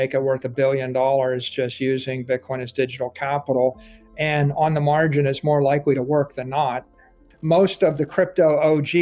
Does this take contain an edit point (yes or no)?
yes